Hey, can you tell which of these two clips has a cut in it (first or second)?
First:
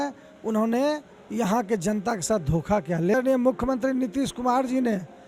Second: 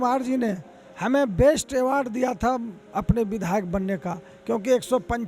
first